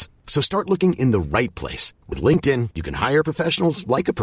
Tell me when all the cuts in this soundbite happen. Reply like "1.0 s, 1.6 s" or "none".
none